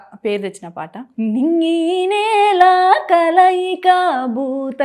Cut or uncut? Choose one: cut